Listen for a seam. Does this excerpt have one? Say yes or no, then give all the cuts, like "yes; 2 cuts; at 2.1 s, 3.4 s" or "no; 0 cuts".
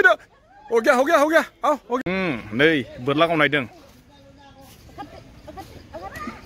yes; 1 cut; at 2.0 s